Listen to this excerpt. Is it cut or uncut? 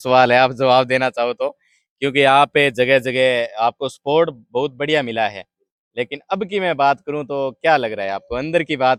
uncut